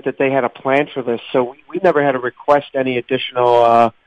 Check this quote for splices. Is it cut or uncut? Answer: uncut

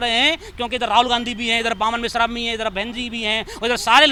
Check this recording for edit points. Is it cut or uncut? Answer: uncut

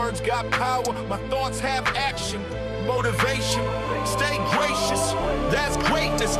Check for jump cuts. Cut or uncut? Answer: uncut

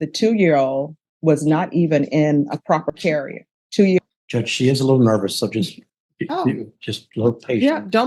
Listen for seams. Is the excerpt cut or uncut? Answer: cut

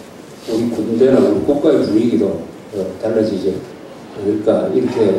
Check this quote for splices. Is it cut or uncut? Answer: cut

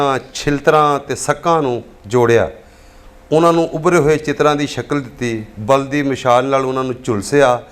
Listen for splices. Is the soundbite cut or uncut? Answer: uncut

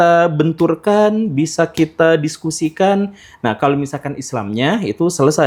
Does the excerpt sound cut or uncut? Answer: uncut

